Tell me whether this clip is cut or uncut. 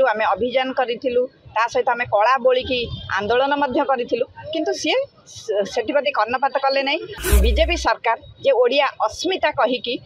cut